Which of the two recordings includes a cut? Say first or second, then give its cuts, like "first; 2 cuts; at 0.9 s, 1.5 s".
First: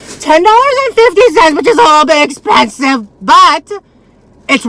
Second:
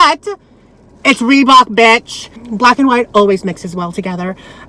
second; 1 cut; at 2.4 s